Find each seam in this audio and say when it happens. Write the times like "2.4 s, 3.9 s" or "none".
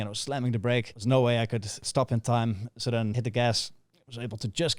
0.9 s, 1.8 s, 3.2 s

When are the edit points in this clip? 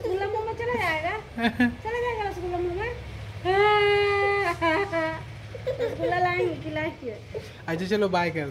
none

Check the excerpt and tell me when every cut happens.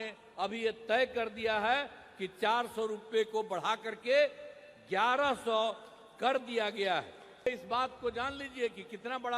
7.5 s

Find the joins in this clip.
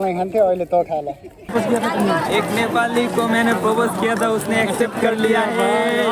1.5 s

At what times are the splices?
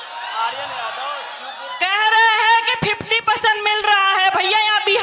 none

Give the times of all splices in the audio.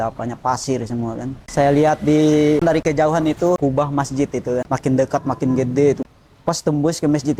1.4 s, 2.6 s, 3.6 s, 4.6 s, 6.0 s

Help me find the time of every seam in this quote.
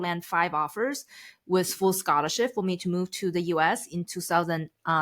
none

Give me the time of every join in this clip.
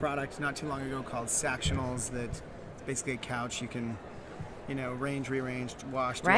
3.5 s

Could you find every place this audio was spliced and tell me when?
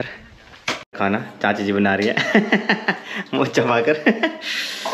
0.9 s

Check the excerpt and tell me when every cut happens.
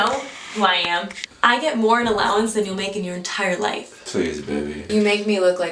1.2 s, 4.8 s

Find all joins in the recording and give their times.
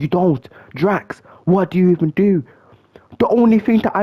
none

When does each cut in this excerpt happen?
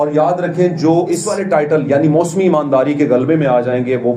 1.3 s

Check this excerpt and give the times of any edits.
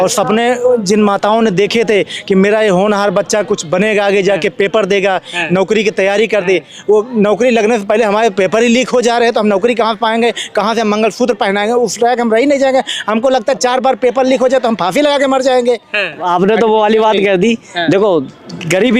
16.2 s

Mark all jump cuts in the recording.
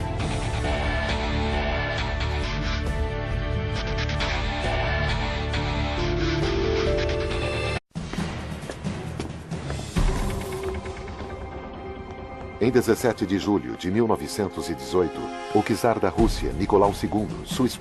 none

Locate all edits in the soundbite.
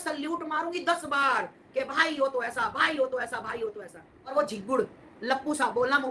4.3 s

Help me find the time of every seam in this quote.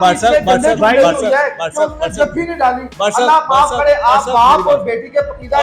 none

